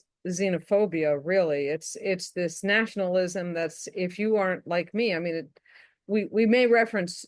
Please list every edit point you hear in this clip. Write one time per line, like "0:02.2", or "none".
none